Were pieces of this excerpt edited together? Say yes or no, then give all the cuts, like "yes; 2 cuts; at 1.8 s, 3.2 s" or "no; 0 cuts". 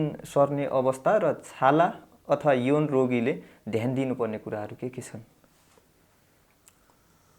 no; 0 cuts